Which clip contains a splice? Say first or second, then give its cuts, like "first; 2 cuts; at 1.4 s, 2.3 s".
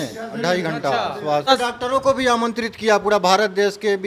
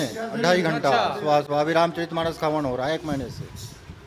first; 1 cut; at 1.5 s